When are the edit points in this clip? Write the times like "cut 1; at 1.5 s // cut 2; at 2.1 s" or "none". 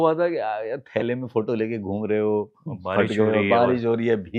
none